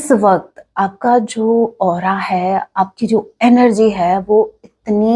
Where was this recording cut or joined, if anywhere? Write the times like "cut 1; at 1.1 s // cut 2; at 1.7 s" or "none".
none